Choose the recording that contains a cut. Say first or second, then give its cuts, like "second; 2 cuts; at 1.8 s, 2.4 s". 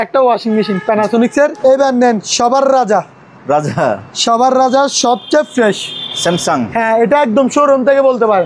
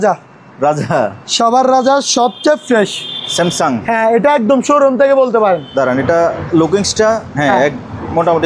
first; 1 cut; at 1.5 s